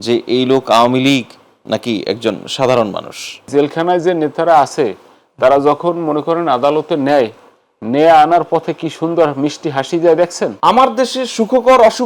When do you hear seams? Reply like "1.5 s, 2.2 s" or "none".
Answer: 3.5 s, 10.5 s